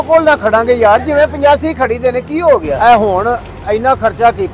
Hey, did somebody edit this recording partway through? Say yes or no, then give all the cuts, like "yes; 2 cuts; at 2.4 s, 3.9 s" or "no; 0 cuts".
yes; 1 cut; at 2.7 s